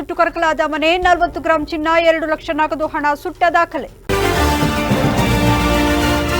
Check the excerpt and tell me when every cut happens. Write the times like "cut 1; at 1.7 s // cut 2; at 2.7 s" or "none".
cut 1; at 3.9 s

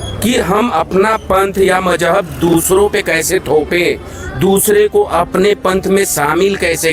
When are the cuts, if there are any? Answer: none

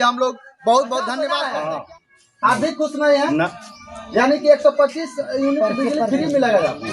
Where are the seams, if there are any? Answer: cut 1; at 1.3 s

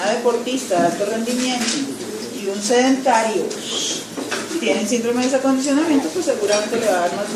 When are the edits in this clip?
cut 1; at 1.7 s

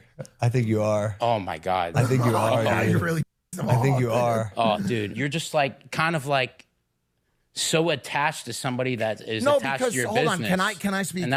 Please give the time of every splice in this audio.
none

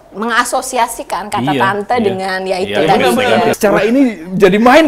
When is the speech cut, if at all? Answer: cut 1; at 3.6 s

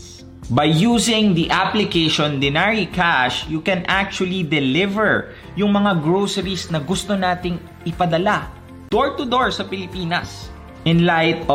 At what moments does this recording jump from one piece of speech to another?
none

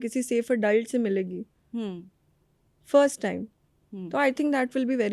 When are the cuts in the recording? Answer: none

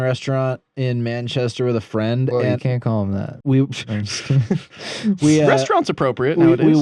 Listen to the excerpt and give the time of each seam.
none

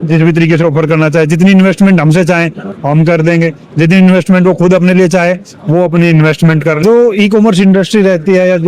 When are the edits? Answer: cut 1; at 6.8 s

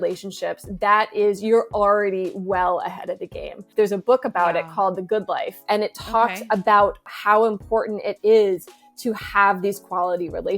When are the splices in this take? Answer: cut 1; at 3.6 s // cut 2; at 5.6 s // cut 3; at 7.0 s

